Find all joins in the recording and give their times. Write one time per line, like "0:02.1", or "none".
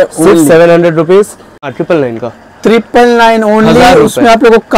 0:01.7

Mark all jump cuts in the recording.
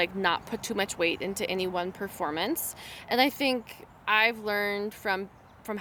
none

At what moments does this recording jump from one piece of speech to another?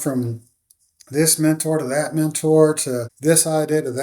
0:03.1

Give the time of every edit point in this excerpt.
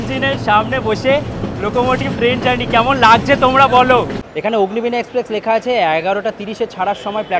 0:04.2

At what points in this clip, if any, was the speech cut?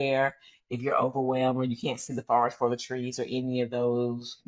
none

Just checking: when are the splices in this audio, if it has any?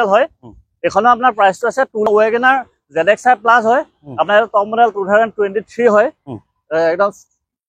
0:02.1

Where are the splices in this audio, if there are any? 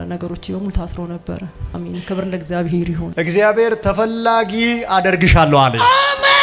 0:03.0

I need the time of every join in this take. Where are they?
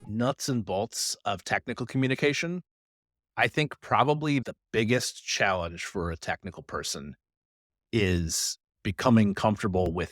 none

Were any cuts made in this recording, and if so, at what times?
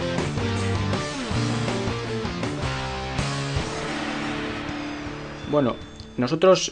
none

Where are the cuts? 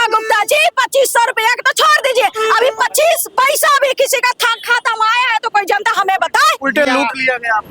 none

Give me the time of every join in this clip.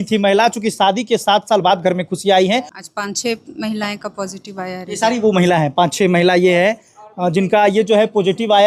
0:02.7

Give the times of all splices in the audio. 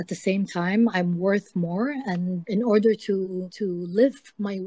0:02.4
0:03.5

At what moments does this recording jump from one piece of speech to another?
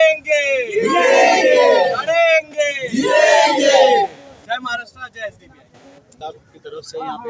0:06.2

